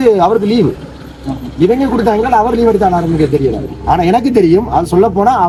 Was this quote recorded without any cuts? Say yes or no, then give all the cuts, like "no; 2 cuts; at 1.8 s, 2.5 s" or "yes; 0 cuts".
yes; 0 cuts